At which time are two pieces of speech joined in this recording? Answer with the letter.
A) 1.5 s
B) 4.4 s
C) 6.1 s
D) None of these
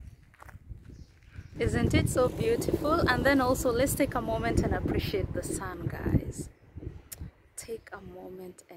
A